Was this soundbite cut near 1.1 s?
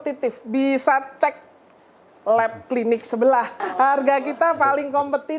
no; 1 cut; at 3.6 s

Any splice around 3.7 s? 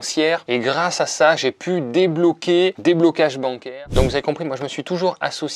yes; 1 cut; at 3.7 s

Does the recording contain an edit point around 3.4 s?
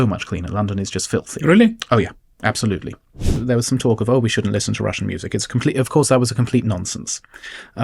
yes; 1 cut; at 3.4 s

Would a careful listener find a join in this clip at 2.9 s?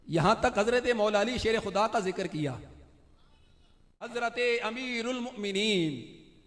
no; 1 cut; at 4.1 s

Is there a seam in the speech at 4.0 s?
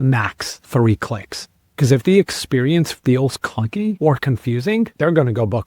yes; 2 cuts; at 4.0 s, 4.9 s

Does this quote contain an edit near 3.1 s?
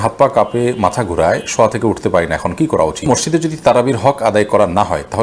yes; 1 cut; at 3.1 s

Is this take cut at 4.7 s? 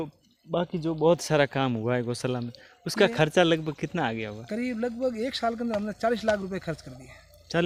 no; 0 cuts

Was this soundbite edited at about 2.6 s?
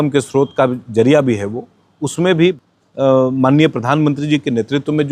yes; 1 cut; at 2.6 s

